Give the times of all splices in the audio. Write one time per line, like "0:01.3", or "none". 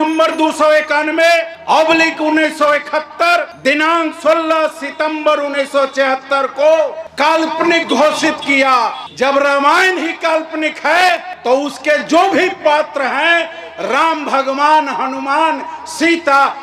none